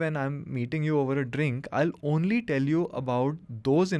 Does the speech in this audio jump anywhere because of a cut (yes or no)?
no